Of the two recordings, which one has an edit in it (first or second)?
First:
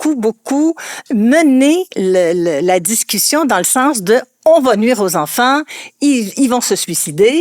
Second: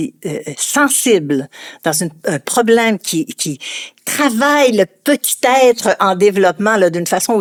first